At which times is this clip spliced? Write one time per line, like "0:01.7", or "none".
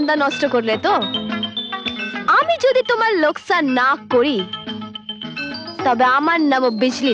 none